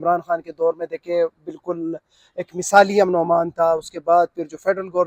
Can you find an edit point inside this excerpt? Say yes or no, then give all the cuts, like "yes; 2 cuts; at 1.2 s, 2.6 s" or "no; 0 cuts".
no; 0 cuts